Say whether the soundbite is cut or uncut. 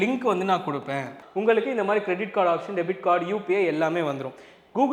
cut